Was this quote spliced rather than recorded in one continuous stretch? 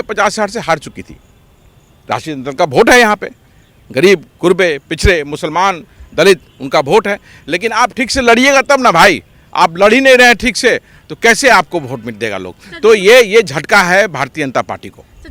no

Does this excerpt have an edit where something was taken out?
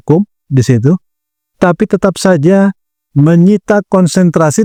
no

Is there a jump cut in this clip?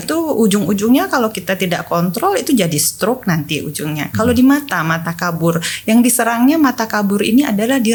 no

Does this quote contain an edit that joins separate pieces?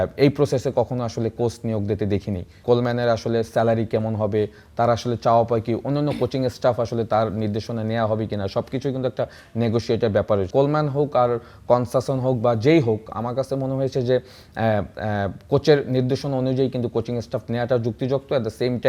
yes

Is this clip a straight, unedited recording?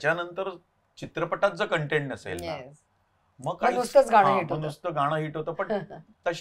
yes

